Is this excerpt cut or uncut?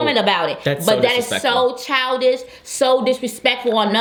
uncut